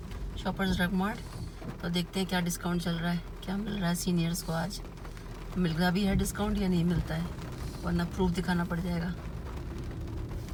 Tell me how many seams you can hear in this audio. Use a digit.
0